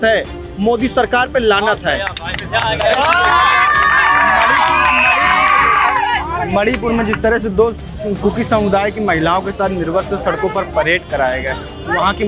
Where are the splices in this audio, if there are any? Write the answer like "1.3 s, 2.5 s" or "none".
none